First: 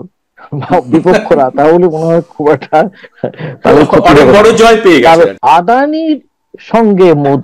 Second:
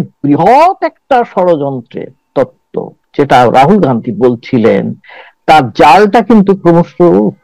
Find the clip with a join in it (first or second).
first